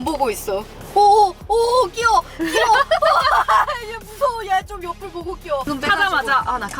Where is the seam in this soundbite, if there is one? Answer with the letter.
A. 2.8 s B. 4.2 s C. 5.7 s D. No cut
C